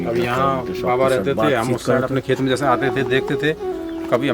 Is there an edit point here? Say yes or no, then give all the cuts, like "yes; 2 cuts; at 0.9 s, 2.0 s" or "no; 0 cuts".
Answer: no; 0 cuts